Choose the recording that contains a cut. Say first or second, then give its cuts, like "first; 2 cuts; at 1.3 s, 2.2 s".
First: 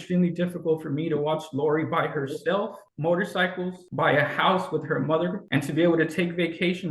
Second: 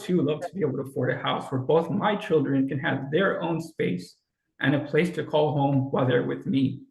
first; 3 cuts; at 2.8 s, 3.8 s, 5.4 s